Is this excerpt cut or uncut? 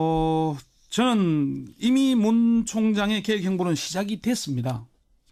uncut